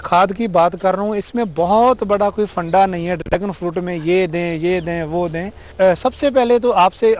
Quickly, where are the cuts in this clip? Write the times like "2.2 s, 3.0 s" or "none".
5.6 s